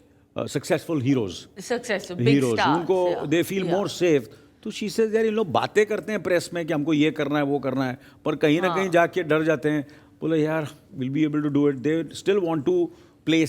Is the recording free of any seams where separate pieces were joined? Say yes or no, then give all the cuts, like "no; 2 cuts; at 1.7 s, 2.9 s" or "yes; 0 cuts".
yes; 0 cuts